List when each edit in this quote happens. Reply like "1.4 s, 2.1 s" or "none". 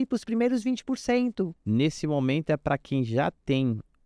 1.6 s